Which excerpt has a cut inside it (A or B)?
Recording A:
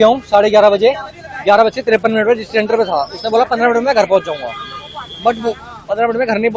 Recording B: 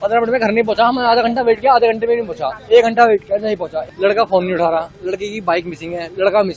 B